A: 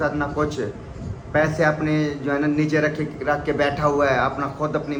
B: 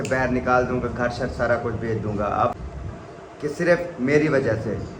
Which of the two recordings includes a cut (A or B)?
B